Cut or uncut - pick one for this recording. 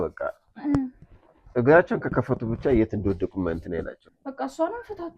cut